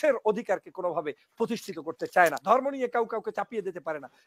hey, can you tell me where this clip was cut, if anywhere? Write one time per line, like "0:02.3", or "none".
0:02.4